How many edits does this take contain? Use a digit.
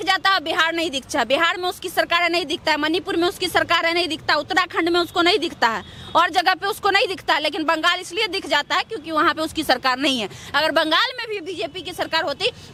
0